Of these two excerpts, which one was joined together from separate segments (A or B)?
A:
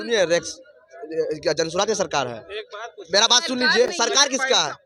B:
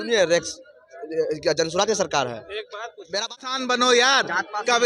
B